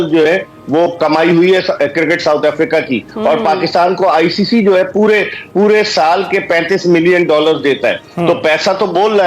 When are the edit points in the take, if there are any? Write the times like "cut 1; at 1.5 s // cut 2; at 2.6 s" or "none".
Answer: none